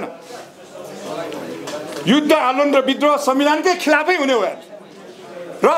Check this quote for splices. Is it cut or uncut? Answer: uncut